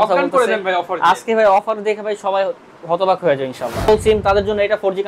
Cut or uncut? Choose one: cut